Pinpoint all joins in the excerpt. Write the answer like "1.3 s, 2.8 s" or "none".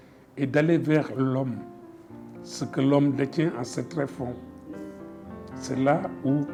none